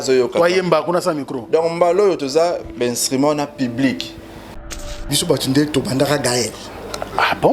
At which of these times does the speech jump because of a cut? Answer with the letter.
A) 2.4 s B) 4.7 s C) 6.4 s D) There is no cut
B